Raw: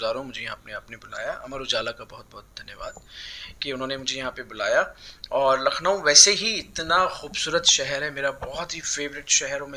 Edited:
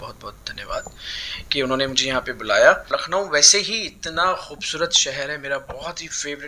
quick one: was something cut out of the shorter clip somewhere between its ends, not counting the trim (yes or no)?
yes